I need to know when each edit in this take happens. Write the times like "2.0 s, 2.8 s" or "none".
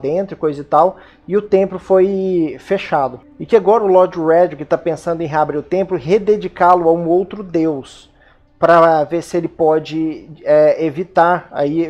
5.2 s